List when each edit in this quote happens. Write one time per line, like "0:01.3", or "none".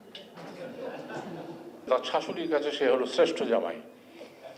0:01.9

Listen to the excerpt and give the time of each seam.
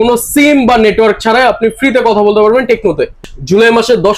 0:03.2

